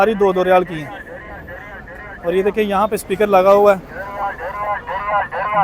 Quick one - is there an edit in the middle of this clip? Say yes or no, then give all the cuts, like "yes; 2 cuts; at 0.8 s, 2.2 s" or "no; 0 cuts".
no; 0 cuts